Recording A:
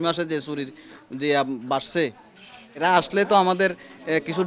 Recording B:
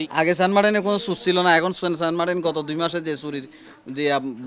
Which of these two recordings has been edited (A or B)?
A